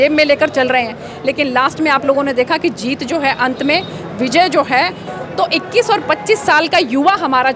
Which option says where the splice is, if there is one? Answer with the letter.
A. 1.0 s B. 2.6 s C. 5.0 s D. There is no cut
C